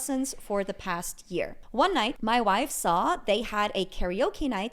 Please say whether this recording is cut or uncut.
cut